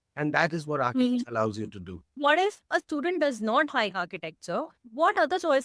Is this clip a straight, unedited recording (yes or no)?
no